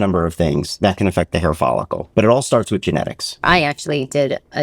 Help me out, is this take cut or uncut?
cut